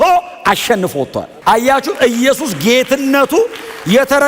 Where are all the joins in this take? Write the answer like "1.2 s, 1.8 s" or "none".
1.3 s